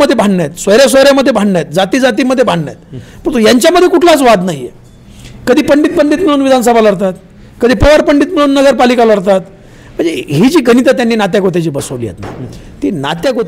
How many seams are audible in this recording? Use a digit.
0